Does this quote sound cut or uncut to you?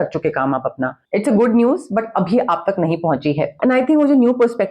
cut